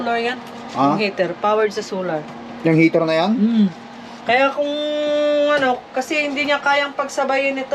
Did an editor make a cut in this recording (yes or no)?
no